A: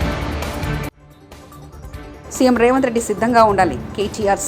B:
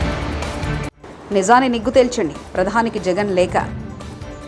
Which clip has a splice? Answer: A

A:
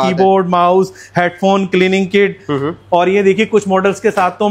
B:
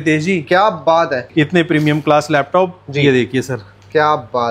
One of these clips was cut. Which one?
B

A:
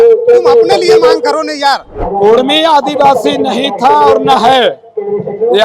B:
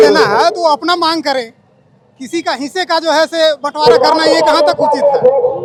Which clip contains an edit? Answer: A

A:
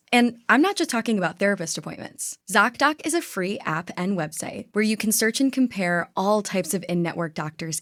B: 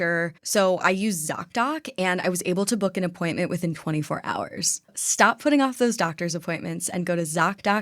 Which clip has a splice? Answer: B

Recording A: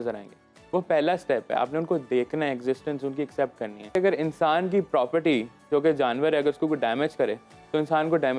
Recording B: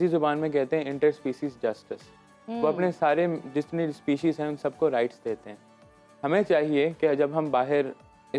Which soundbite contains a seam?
A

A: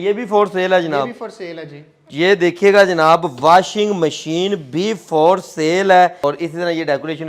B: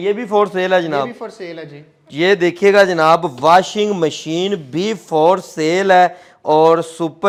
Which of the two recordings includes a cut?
A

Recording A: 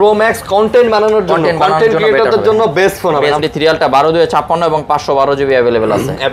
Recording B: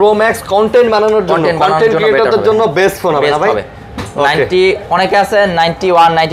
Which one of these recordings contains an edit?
A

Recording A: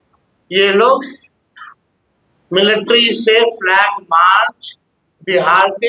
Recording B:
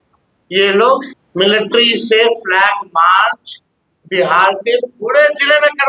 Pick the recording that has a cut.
B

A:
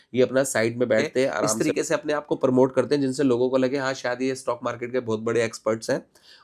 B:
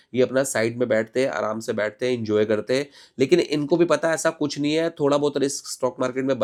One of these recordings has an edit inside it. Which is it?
A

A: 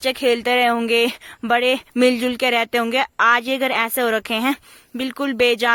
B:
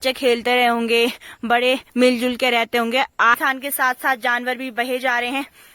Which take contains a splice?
B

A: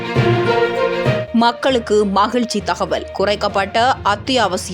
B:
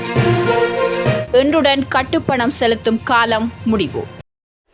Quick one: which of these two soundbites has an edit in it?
A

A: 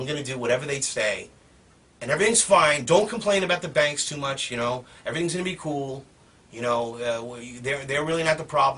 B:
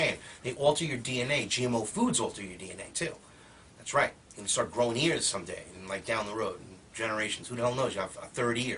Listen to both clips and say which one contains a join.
A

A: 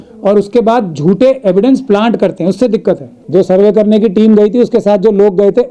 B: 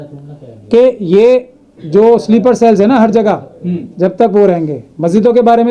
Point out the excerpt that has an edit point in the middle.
A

